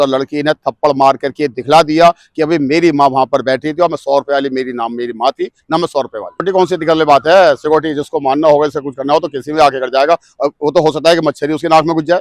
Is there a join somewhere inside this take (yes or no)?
yes